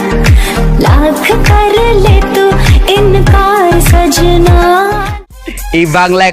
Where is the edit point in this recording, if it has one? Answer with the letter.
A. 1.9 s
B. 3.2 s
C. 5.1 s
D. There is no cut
C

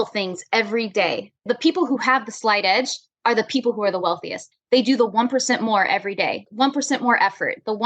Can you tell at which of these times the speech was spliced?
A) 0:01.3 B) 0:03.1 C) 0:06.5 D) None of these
C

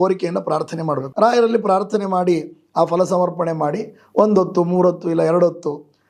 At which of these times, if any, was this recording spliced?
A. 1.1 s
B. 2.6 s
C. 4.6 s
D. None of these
A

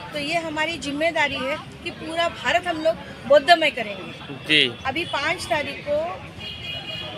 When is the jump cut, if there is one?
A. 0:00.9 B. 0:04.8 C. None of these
B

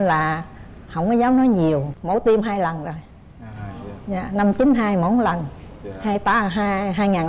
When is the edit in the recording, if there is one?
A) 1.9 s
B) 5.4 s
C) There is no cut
A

